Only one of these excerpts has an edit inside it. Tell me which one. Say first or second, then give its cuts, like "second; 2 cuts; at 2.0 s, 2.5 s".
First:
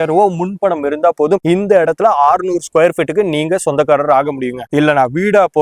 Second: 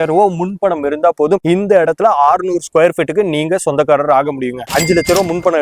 second; 1 cut; at 4.7 s